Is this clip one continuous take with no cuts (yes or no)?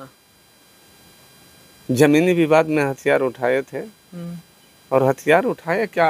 yes